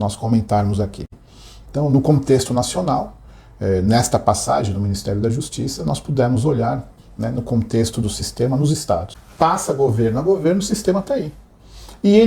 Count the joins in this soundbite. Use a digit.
1